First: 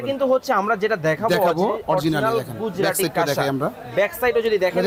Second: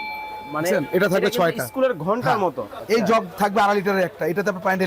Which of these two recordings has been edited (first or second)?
second